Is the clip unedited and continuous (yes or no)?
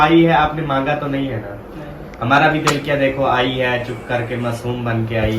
yes